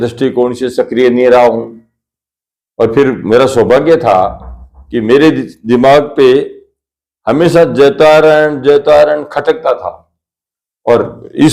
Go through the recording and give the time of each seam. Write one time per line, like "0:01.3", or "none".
none